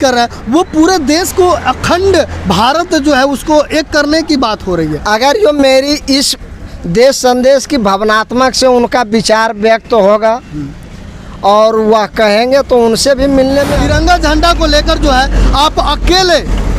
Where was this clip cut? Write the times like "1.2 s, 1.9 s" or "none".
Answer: 13.6 s

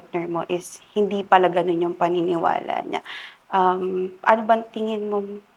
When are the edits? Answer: none

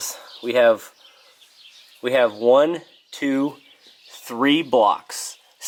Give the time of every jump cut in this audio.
none

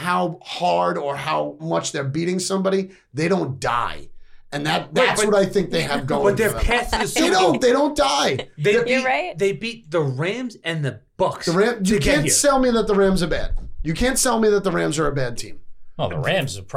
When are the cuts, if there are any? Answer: 1.6 s

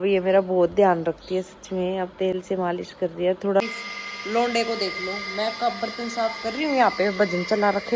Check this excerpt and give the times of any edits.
3.6 s

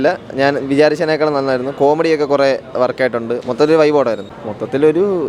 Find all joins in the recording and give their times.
none

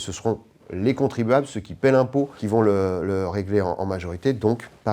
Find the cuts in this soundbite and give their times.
2.4 s

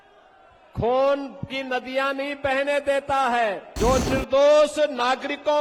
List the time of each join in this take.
3.7 s

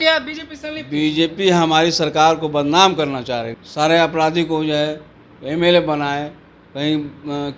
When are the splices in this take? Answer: 3.5 s

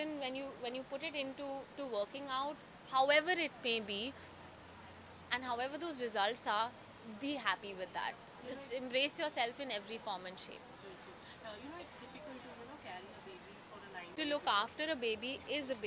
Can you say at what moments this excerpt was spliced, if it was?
14.1 s

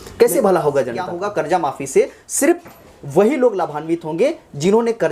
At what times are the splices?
1.2 s

